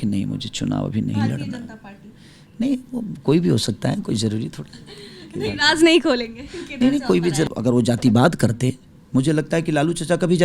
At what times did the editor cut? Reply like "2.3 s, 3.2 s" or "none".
7.5 s